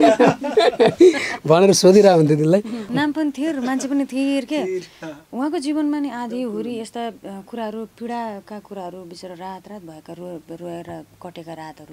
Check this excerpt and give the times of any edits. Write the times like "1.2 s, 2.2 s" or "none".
2.9 s